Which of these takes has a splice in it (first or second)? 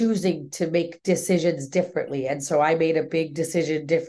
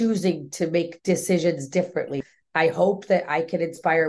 second